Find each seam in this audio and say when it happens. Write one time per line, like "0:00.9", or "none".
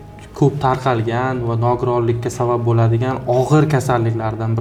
none